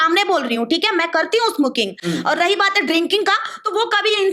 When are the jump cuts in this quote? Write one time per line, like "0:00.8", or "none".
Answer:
none